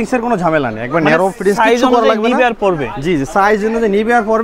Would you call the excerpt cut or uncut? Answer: uncut